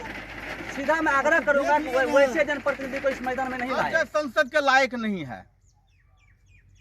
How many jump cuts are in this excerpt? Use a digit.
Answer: 1